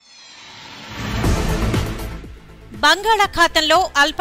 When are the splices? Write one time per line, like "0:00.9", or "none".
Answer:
0:01.5